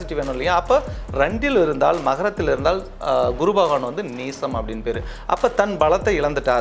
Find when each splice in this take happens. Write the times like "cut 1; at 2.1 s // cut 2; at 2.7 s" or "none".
none

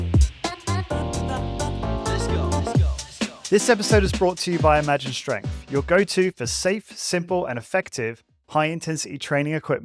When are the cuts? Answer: cut 1; at 3.4 s

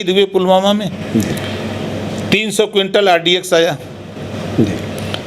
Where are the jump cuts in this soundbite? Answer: none

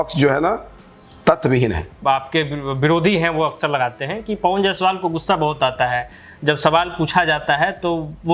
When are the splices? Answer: cut 1; at 1.9 s

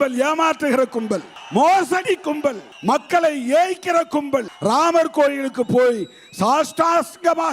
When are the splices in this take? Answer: cut 1; at 1.3 s // cut 2; at 2.7 s // cut 3; at 4.5 s

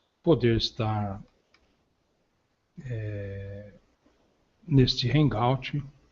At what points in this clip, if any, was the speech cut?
cut 1; at 3.3 s

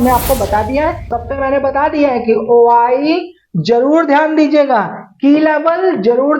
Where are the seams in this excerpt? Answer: cut 1; at 1.1 s

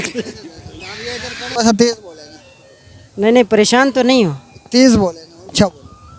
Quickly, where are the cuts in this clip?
cut 1; at 1.5 s

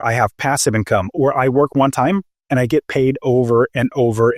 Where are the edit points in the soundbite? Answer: cut 1; at 1.1 s

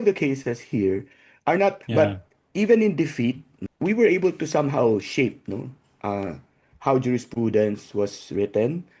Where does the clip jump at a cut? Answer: cut 1; at 1.8 s // cut 2; at 3.5 s

